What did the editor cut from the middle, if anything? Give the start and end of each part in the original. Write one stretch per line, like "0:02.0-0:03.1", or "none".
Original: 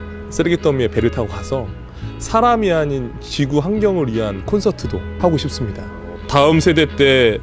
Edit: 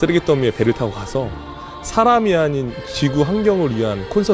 none